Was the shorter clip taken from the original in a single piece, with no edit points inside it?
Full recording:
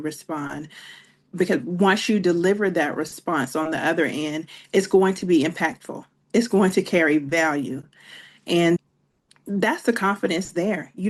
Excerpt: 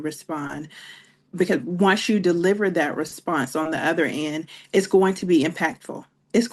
yes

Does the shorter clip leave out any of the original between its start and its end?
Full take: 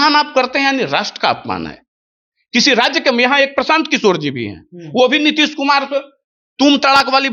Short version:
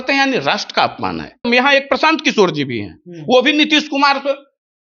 yes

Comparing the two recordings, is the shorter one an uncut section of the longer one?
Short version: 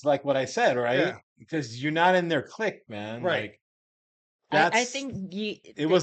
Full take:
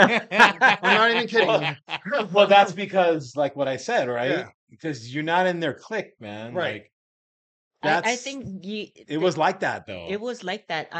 yes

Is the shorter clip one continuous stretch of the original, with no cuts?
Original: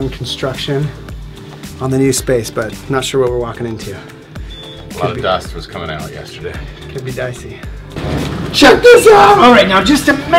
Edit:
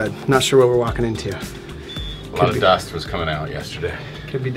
yes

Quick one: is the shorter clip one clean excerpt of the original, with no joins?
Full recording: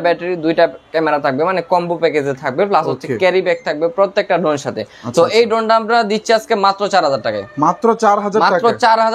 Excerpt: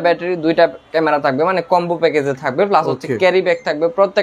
yes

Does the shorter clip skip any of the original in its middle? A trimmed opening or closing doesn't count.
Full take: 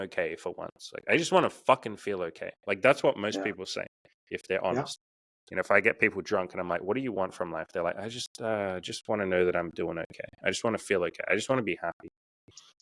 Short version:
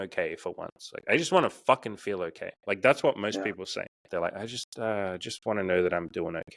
yes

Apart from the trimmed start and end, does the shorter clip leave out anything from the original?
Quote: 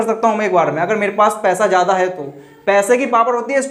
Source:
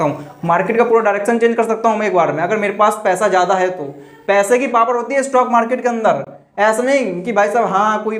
no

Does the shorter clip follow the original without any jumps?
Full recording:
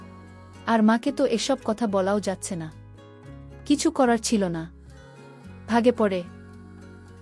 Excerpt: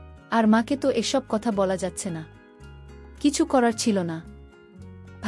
no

